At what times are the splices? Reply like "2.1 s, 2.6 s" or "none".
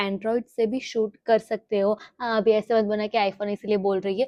none